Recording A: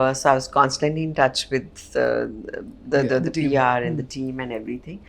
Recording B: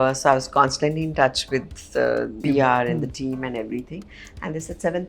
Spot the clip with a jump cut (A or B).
B